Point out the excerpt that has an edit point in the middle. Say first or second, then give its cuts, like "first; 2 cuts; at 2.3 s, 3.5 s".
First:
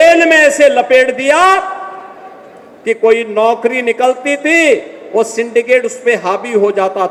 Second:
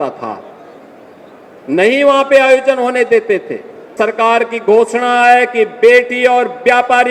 second; 1 cut; at 3.9 s